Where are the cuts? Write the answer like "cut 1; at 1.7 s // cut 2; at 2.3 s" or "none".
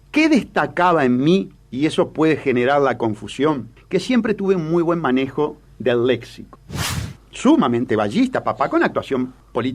cut 1; at 7.0 s